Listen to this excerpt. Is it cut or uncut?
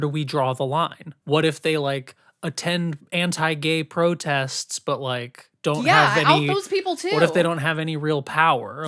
cut